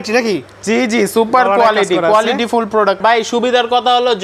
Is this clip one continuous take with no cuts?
no; 1 cut; at 3.0 s

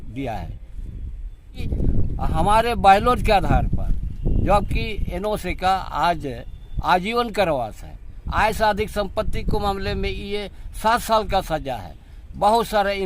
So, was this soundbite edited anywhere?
yes; 1 cut; at 1.7 s

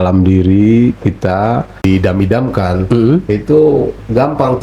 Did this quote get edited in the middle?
yes; 1 cut; at 1.7 s

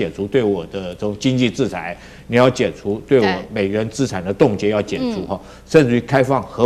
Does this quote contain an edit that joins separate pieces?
no; 0 cuts

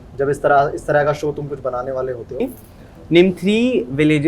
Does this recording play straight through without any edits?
no; 1 cut; at 2.5 s

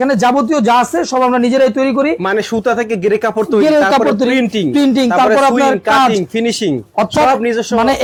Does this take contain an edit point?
no; 0 cuts

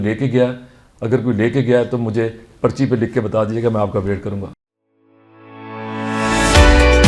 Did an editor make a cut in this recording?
yes; 1 cut; at 4.6 s

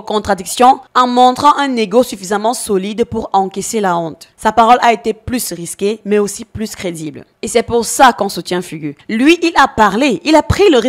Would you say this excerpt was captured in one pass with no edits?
yes; 0 cuts

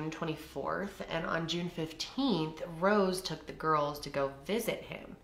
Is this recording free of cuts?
yes; 0 cuts

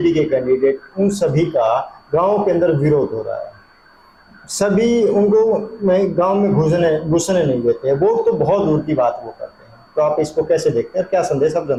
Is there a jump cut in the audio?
no; 0 cuts

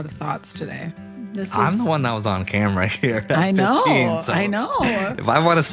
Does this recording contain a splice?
yes; 1 cut; at 1.1 s

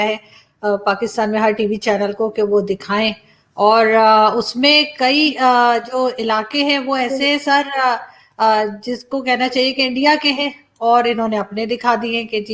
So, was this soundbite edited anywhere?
no; 0 cuts

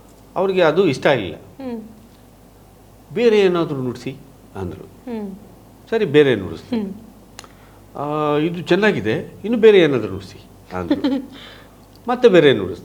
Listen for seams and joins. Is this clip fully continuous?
yes; 0 cuts

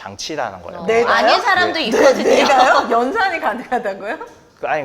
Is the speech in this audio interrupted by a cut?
no; 0 cuts

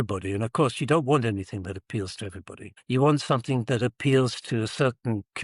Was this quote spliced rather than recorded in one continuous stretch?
no; 0 cuts

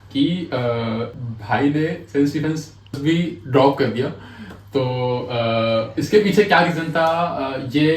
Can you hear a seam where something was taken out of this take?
yes; 2 cuts; at 1.2 s, 3.0 s

